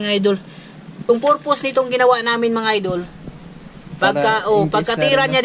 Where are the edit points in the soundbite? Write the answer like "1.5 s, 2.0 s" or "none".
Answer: 1.1 s

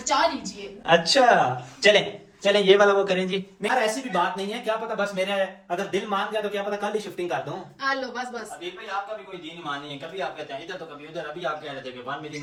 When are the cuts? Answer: none

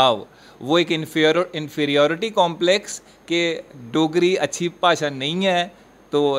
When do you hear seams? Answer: none

